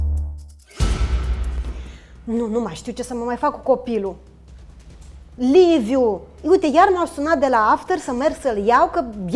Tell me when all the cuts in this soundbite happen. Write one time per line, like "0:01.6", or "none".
none